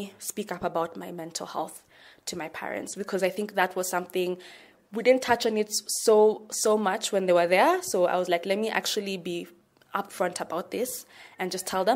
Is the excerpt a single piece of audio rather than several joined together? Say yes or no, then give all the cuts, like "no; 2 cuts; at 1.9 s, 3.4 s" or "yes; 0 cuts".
yes; 0 cuts